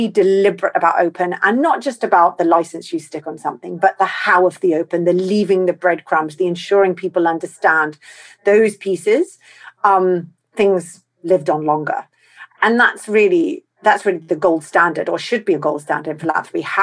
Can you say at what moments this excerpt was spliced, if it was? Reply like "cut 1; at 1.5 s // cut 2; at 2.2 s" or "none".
none